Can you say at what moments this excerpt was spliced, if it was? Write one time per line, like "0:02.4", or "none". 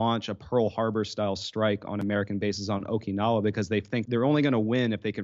0:04.0